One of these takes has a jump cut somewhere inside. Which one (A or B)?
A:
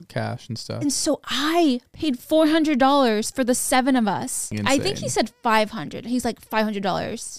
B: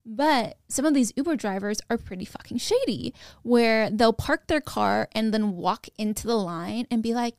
A